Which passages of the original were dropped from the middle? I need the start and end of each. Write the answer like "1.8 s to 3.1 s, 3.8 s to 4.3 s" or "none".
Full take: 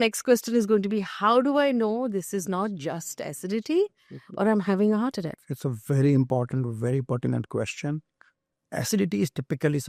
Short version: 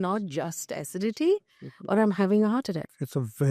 none